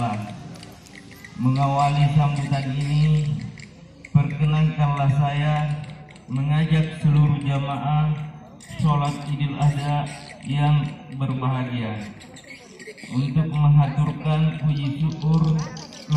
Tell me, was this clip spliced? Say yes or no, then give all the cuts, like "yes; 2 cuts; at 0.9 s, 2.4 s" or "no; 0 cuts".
no; 0 cuts